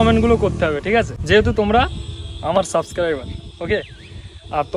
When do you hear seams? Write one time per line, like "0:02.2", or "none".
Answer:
0:01.2